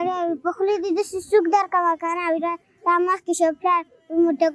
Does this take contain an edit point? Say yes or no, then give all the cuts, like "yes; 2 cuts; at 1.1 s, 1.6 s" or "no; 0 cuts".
no; 0 cuts